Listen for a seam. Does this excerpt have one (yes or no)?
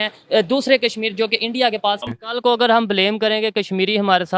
yes